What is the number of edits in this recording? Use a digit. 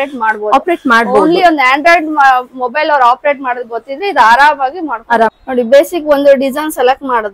1